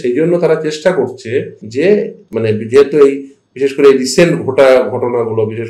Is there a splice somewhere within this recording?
yes; 2 cuts; at 1.6 s, 2.2 s

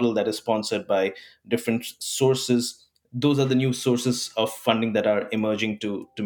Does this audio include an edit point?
no; 0 cuts

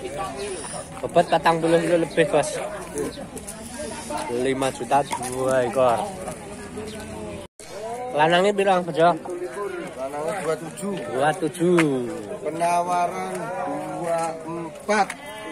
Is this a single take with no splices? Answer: no; 1 cut; at 7.7 s

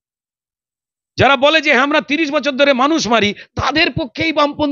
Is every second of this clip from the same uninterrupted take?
yes; 0 cuts

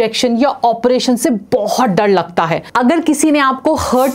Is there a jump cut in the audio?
yes; 1 cut; at 2.6 s

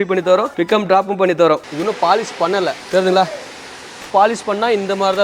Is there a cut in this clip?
yes; 3 cuts; at 1.7 s, 2.8 s, 4.1 s

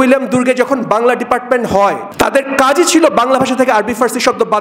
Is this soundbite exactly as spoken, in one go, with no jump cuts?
no; 1 cut; at 2.0 s

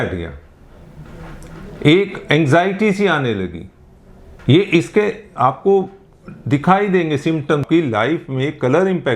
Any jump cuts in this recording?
yes; 1 cut; at 7.6 s

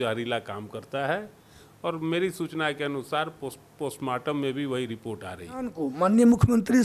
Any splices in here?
yes; 1 cut; at 5.8 s

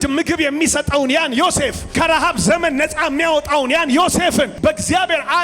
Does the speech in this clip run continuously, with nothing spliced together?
no; 2 cuts; at 1.8 s, 4.5 s

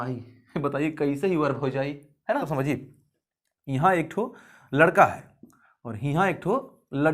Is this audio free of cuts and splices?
no; 1 cut; at 2.5 s

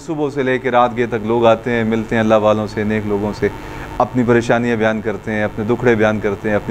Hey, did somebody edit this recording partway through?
no; 0 cuts

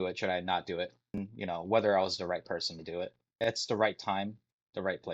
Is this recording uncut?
no; 2 cuts; at 1.3 s, 3.4 s

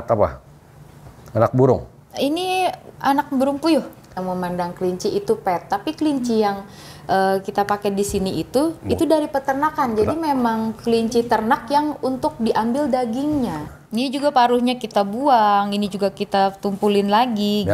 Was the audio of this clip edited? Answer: yes; 2 cuts; at 4.1 s, 13.6 s

